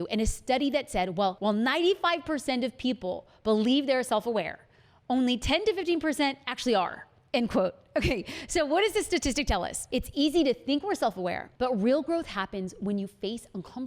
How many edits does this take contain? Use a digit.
1